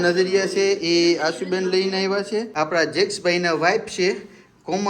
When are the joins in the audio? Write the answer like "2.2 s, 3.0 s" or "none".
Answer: 2.5 s